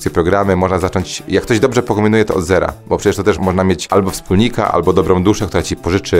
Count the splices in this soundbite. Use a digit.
1